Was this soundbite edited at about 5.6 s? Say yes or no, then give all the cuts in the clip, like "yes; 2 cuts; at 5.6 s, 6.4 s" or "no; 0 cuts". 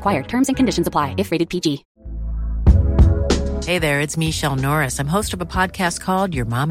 no; 1 cut; at 1.9 s